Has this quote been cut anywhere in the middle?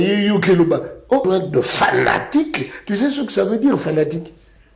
yes; 1 cut; at 1.2 s

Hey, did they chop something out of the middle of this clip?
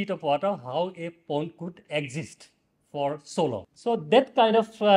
yes; 1 cut; at 3.7 s

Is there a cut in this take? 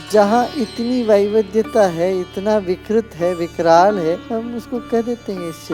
yes; 1 cut; at 4.2 s

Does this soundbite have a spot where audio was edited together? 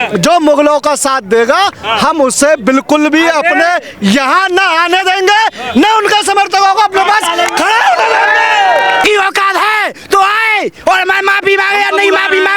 yes; 1 cut; at 9.0 s

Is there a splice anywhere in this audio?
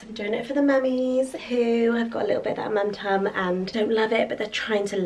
yes; 1 cut; at 3.7 s

